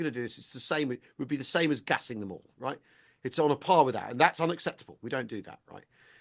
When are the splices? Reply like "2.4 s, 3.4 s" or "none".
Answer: none